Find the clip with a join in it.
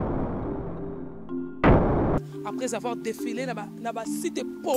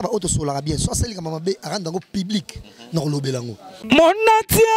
second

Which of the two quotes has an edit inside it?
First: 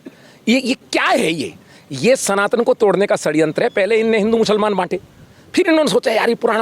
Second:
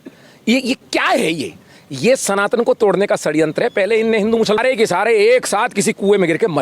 second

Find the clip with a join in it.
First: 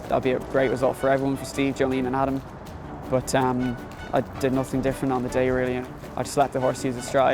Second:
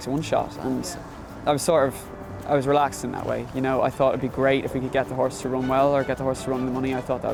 first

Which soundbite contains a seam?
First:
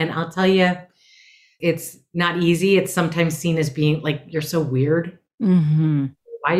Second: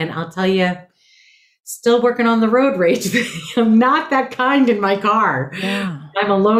first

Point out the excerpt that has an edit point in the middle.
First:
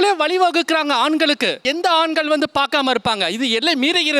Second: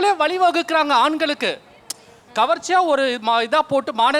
first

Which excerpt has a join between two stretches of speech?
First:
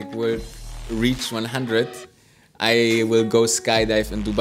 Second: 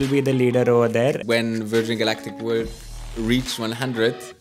second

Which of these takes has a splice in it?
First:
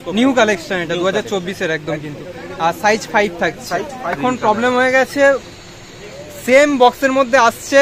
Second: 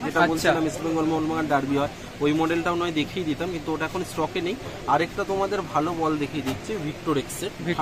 first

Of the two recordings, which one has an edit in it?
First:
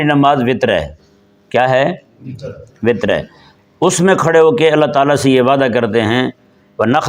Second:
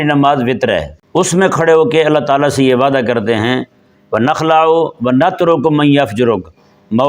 second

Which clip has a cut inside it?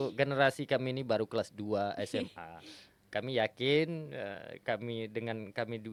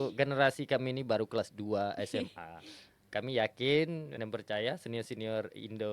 second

